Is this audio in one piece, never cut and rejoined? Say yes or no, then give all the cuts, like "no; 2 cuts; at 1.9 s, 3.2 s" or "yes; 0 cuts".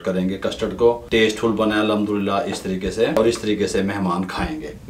no; 2 cuts; at 1.0 s, 3.2 s